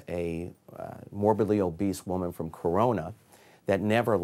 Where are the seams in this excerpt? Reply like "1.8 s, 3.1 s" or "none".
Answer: none